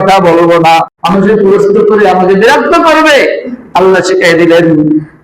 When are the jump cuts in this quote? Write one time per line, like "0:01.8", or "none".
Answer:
0:01.0